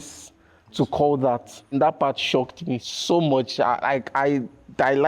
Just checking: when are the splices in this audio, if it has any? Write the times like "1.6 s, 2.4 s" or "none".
1.7 s